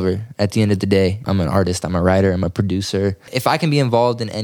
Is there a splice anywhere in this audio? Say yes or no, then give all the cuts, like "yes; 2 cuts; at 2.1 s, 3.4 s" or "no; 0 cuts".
yes; 2 cuts; at 1.2 s, 3.3 s